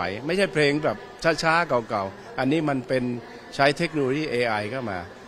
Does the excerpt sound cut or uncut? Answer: uncut